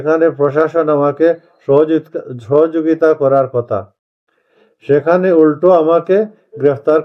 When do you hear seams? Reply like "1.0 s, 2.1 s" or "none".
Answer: none